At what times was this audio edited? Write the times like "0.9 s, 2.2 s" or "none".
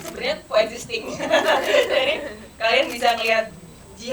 none